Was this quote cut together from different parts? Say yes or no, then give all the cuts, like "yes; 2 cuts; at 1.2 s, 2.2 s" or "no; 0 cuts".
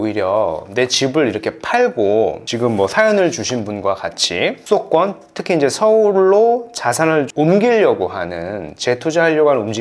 no; 0 cuts